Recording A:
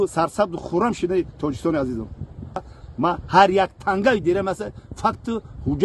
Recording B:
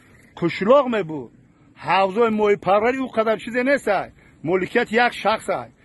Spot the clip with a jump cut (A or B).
A